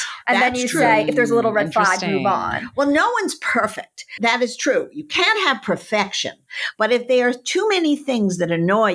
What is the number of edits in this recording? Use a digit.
0